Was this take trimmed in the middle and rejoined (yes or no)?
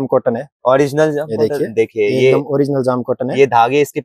no